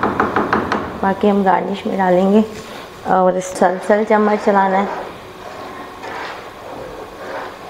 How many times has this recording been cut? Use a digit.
1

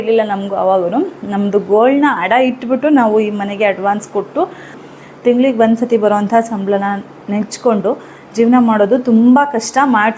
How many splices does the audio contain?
1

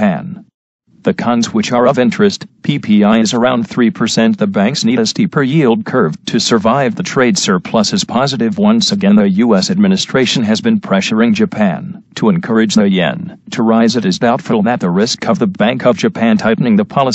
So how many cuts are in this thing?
1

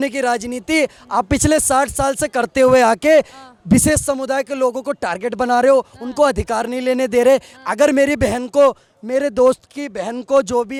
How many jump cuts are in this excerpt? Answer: 0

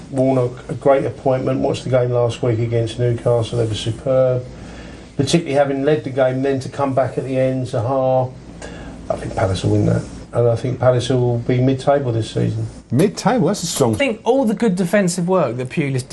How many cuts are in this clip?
0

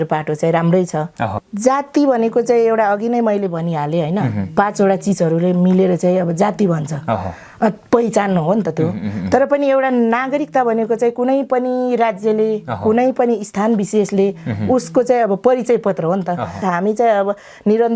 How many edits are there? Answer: 2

